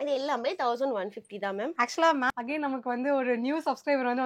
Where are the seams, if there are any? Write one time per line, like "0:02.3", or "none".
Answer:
0:02.3